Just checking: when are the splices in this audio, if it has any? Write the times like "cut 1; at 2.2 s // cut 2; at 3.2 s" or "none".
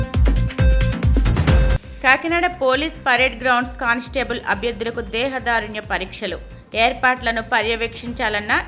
cut 1; at 1.3 s

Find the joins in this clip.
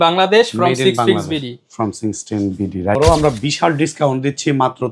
cut 1; at 2.9 s

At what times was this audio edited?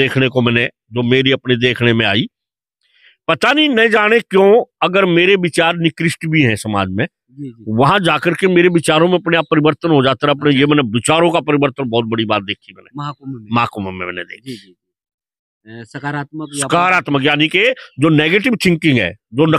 none

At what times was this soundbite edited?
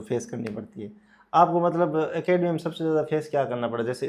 none

